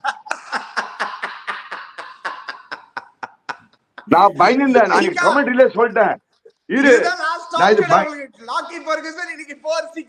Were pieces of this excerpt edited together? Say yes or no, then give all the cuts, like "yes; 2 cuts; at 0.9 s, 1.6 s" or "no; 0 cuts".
no; 0 cuts